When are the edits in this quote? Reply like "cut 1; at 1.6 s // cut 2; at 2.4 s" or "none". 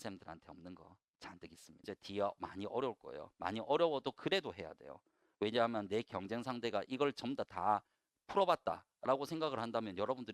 cut 1; at 1.8 s

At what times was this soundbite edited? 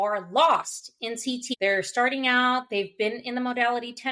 cut 1; at 1.5 s

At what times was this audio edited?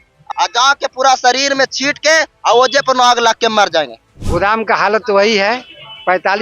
cut 1; at 4.0 s

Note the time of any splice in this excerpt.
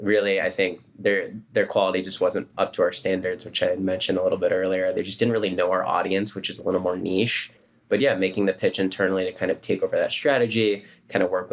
cut 1; at 7.7 s

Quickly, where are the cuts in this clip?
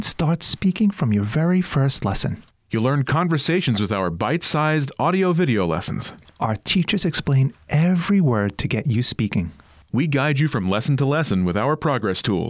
none

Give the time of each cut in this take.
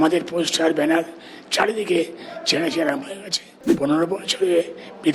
cut 1; at 3.8 s

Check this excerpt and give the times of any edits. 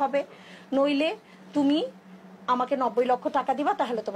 none

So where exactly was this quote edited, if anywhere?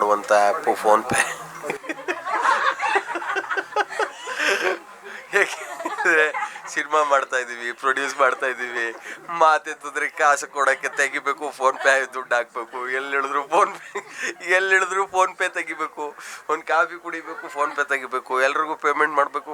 none

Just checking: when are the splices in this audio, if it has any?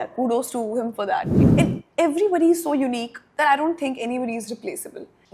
cut 1; at 1.3 s

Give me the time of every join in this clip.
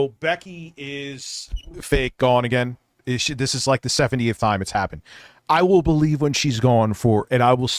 none

